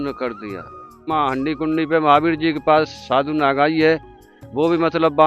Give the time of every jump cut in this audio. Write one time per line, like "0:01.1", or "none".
0:01.0